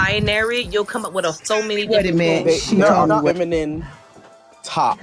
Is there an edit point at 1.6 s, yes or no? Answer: no